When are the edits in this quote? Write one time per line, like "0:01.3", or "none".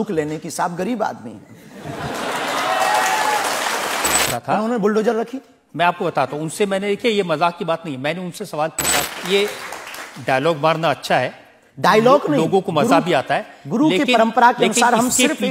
0:04.3
0:09.0